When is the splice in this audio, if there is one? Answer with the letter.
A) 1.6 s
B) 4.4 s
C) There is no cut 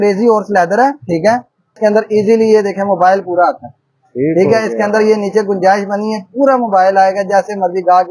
A